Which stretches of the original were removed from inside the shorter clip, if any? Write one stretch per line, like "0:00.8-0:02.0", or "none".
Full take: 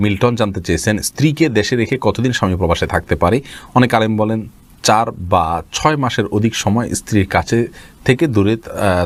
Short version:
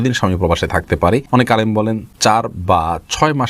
0:03.2-0:03.4
0:04.5-0:04.7